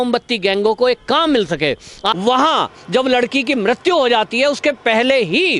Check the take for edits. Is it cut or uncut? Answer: cut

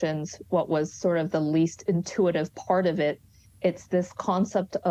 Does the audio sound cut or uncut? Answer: uncut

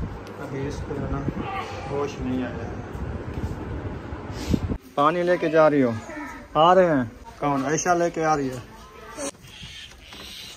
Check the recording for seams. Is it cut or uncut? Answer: cut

